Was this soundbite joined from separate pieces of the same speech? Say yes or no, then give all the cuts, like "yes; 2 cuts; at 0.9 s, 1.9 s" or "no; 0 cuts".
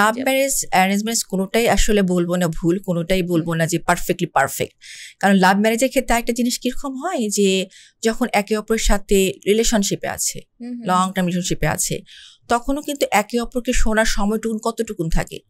no; 0 cuts